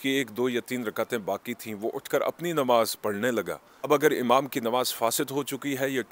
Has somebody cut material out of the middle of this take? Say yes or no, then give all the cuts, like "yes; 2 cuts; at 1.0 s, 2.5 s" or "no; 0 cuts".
yes; 1 cut; at 3.9 s